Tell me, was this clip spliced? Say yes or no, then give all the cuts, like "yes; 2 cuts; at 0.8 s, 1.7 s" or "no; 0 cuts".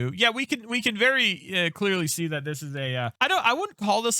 yes; 1 cut; at 3.1 s